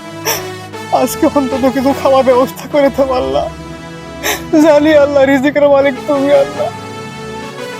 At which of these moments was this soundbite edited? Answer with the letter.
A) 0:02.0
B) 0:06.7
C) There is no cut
B